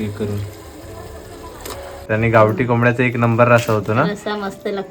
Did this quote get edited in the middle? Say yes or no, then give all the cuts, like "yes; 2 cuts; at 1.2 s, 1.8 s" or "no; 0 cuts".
yes; 1 cut; at 2.0 s